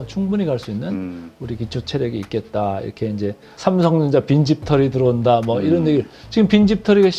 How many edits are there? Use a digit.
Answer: 1